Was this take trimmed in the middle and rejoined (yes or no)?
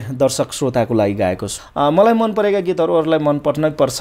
yes